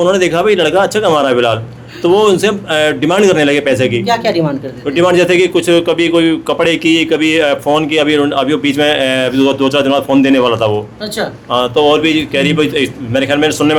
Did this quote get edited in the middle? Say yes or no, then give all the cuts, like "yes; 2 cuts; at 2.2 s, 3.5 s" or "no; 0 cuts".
no; 0 cuts